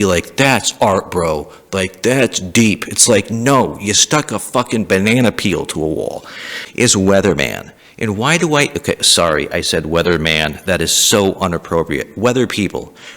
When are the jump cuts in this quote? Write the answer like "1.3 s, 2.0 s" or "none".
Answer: 6.6 s